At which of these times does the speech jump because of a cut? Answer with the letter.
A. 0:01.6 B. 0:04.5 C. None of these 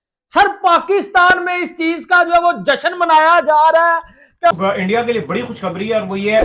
B